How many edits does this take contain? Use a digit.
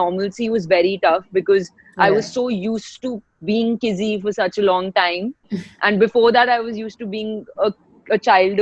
0